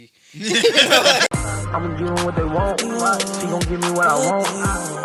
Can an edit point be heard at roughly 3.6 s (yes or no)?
no